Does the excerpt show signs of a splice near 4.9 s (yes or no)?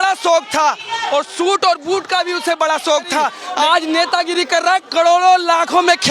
no